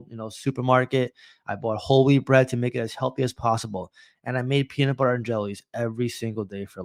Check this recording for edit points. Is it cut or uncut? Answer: uncut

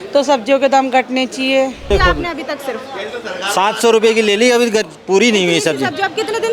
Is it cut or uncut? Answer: cut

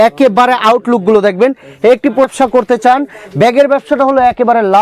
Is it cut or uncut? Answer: cut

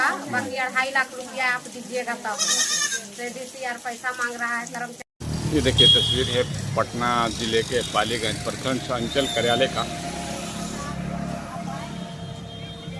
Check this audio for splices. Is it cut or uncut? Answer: cut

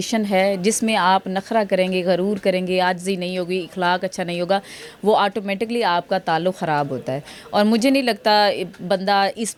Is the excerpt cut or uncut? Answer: uncut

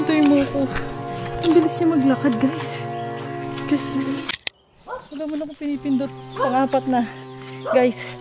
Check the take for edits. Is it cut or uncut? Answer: cut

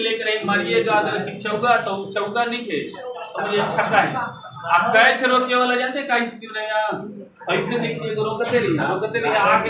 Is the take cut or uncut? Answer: uncut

